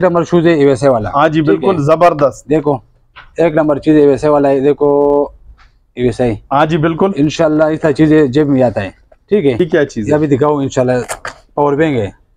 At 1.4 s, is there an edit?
no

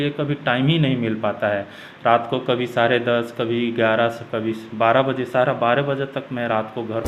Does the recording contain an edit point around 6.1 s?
no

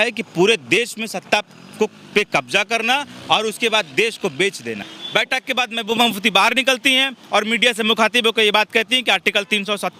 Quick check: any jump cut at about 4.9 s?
yes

